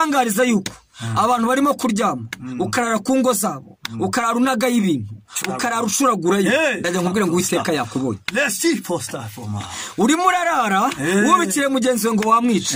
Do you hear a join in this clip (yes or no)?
no